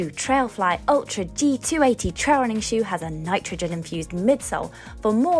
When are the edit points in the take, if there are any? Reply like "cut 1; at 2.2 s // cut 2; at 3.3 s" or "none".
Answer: none